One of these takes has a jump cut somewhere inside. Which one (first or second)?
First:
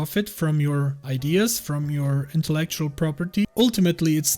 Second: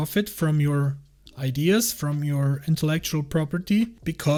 first